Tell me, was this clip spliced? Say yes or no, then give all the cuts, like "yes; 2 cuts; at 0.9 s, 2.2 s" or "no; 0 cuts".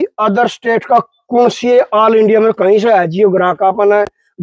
no; 0 cuts